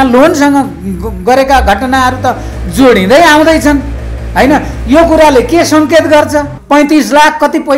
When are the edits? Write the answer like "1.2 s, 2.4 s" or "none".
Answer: 6.5 s

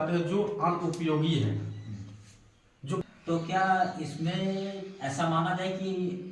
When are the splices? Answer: 3.0 s

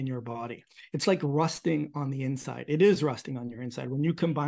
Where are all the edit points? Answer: none

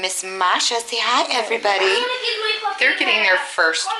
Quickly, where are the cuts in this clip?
none

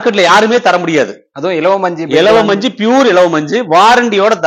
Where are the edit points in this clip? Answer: none

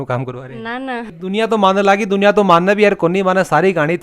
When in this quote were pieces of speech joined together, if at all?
1.1 s

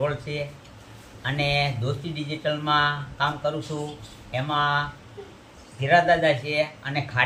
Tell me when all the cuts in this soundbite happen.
none

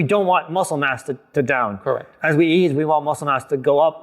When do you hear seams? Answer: 2.1 s

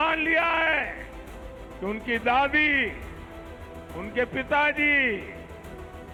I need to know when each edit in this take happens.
none

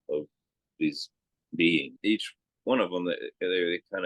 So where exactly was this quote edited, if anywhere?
1.9 s

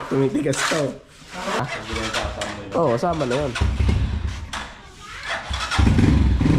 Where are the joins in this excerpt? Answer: 1.6 s

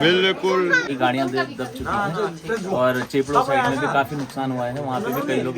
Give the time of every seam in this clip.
0.9 s

